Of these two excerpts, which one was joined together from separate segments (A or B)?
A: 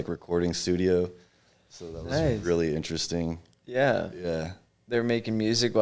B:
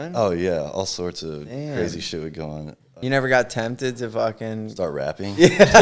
B